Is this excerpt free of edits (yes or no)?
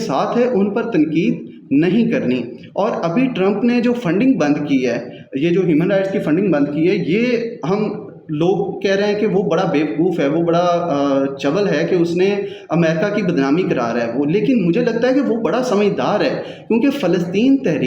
yes